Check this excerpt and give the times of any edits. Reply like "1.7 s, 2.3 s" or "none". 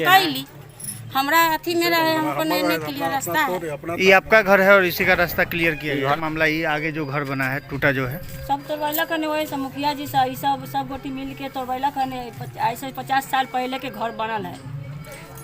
6.2 s